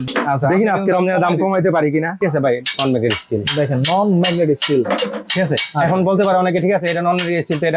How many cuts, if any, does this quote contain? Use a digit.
1